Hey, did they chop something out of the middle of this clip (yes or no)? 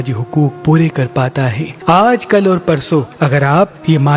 yes